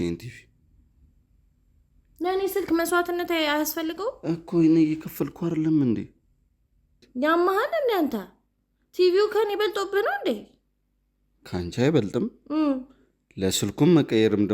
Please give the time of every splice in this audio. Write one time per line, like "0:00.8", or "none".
0:07.1